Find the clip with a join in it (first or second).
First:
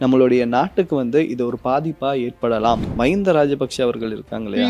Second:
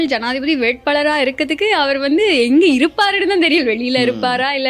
first